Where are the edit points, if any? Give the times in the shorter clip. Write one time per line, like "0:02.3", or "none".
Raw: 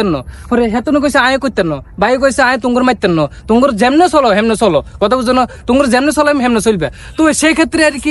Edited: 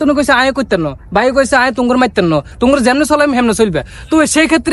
0:02.5